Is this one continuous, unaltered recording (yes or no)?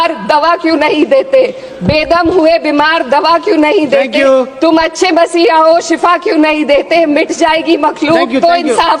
yes